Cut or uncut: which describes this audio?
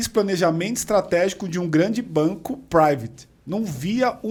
uncut